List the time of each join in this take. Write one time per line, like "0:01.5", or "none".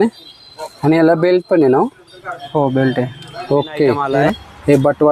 0:04.0